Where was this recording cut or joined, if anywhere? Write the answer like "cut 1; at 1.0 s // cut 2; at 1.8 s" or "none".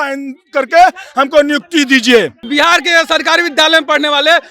cut 1; at 2.4 s